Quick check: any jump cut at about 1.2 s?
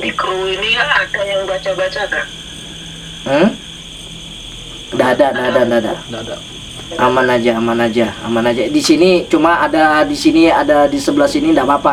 no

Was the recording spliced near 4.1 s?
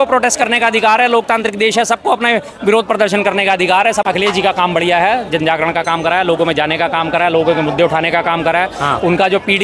yes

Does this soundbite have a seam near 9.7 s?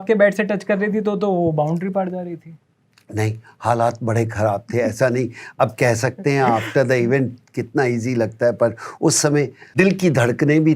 yes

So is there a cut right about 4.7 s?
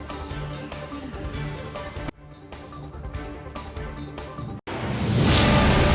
yes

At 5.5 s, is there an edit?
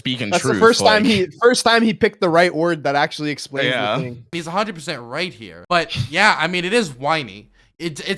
yes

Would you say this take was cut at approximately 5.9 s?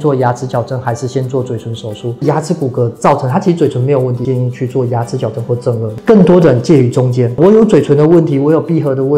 yes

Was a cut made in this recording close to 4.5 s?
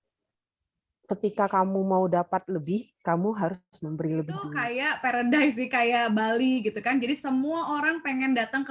yes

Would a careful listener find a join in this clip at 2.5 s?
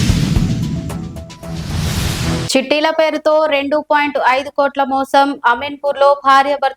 yes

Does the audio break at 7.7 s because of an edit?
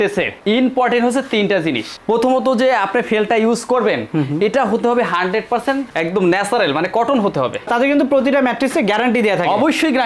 yes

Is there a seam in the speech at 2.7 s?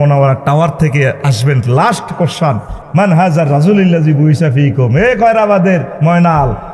yes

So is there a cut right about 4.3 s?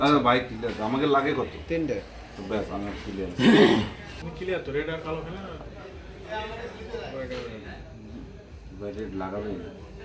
yes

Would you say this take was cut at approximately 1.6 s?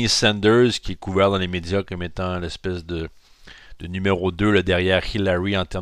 yes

